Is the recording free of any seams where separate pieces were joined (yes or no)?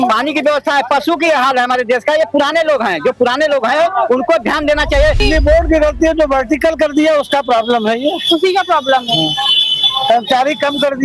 no